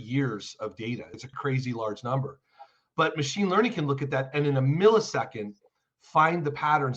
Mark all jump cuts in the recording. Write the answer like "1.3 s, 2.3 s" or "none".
1.1 s

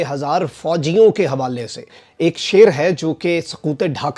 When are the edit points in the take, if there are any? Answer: none

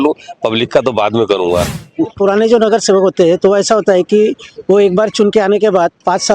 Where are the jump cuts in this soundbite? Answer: 2.1 s

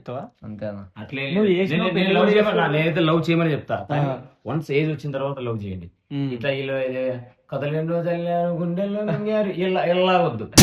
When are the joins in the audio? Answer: none

